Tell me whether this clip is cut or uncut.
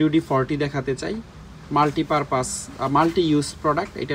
uncut